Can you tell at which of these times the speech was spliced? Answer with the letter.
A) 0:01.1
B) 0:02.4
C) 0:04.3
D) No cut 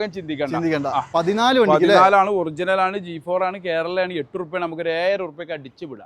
A